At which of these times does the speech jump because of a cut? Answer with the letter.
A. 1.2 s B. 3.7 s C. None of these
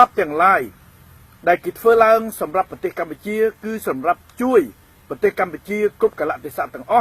B